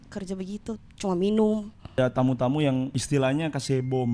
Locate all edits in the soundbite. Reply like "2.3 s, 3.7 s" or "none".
1.9 s, 3.0 s